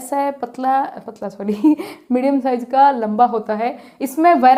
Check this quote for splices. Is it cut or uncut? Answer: uncut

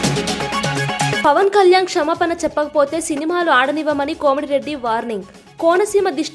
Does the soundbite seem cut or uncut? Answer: cut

